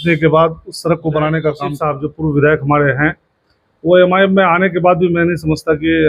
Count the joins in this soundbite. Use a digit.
1